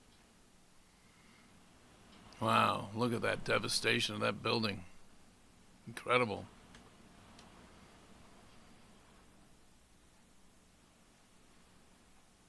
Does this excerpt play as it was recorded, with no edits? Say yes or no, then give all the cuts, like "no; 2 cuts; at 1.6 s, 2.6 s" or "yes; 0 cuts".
yes; 0 cuts